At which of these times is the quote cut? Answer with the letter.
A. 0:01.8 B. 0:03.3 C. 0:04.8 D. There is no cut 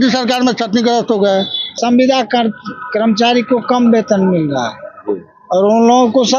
A